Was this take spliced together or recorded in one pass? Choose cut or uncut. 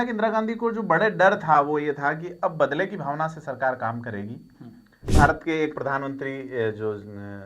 cut